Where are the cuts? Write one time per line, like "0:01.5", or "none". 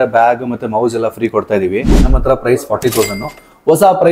0:02.0